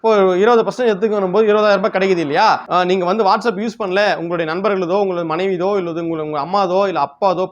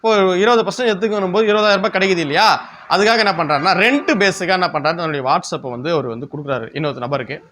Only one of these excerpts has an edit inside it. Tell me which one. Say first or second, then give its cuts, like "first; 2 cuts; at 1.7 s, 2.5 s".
first; 1 cut; at 2.6 s